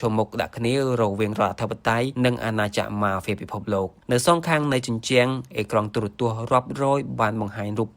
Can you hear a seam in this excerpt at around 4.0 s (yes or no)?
yes